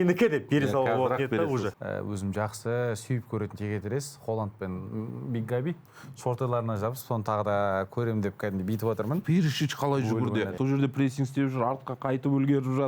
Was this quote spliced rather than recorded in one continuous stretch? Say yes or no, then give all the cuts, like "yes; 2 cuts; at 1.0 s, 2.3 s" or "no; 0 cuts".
yes; 4 cuts; at 1.7 s, 5.8 s, 9.2 s, 10.5 s